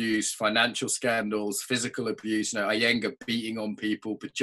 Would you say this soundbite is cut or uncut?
uncut